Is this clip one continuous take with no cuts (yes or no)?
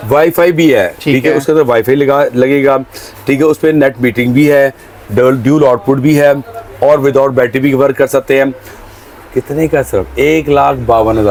yes